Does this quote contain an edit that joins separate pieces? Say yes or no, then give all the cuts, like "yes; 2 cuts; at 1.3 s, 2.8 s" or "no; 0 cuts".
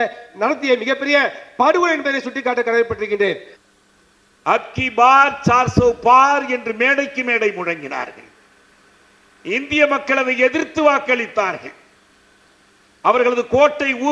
yes; 1 cut; at 3.5 s